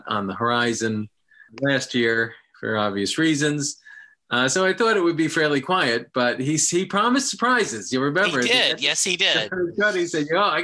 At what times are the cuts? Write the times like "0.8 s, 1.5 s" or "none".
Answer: none